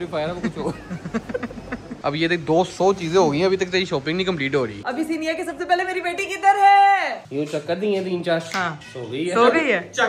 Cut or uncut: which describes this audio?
cut